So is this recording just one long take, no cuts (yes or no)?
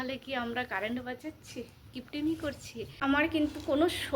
no